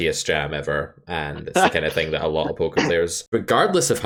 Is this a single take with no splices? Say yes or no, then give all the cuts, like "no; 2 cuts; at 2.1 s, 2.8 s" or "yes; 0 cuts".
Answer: yes; 0 cuts